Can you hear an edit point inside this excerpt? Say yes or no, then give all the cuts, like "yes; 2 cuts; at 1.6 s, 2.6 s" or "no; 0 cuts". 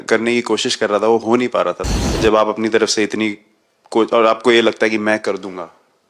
yes; 1 cut; at 1.9 s